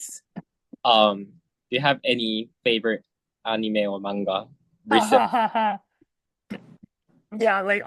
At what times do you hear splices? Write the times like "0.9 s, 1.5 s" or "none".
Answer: none